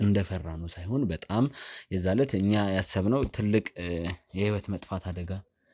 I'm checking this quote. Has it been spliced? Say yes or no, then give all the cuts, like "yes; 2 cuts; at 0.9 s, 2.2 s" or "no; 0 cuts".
no; 0 cuts